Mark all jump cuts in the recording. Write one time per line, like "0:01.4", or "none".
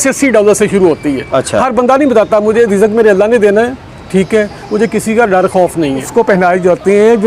0:06.1